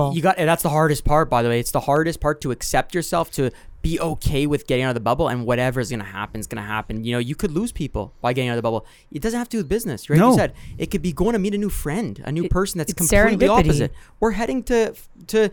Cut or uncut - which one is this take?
uncut